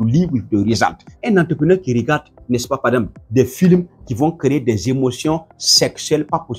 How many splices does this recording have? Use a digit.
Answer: 2